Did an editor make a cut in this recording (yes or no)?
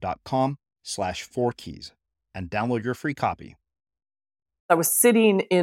yes